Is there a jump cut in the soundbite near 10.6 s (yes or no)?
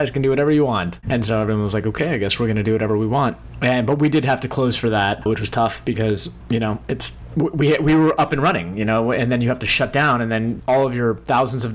yes